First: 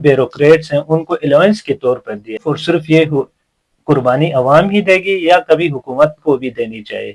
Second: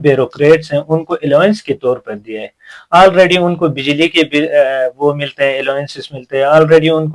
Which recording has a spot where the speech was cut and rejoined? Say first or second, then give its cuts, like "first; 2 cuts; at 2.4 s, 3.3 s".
first; 1 cut; at 2.5 s